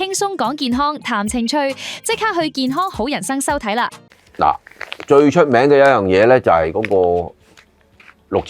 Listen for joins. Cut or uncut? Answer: uncut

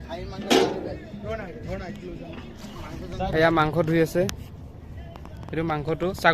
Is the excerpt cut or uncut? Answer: cut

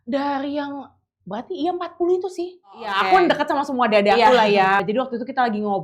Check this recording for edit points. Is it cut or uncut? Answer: cut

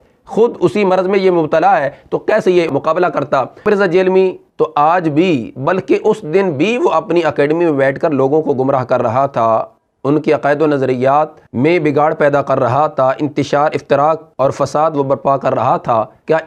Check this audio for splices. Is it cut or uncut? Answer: uncut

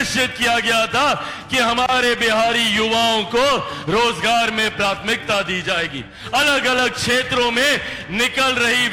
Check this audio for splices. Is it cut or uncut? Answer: uncut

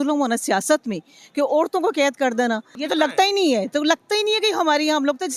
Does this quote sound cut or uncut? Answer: cut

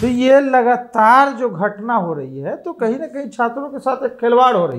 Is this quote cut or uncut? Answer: uncut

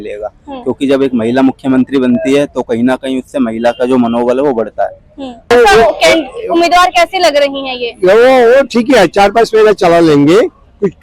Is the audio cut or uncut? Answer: cut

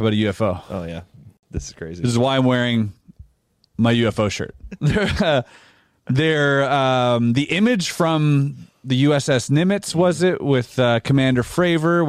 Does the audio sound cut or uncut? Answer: cut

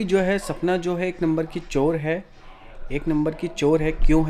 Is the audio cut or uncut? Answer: uncut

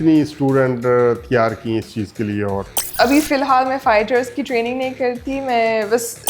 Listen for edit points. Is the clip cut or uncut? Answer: cut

